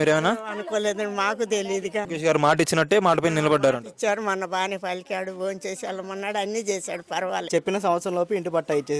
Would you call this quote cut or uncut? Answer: cut